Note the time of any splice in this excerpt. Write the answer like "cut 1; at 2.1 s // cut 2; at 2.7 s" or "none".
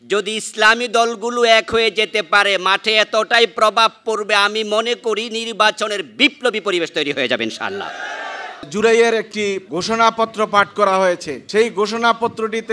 cut 1; at 8.7 s // cut 2; at 9.7 s // cut 3; at 11.3 s